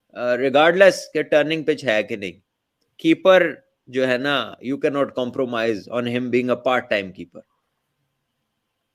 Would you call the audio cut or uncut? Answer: uncut